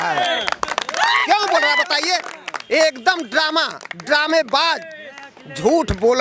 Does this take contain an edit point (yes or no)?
no